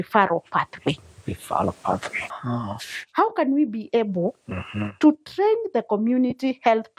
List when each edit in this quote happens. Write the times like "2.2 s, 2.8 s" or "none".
2.2 s